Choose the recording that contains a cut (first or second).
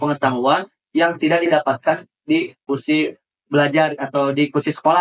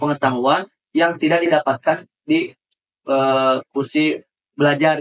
first